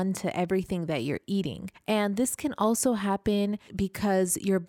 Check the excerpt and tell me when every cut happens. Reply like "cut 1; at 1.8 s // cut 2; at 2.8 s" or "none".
cut 1; at 1.7 s // cut 2; at 3.7 s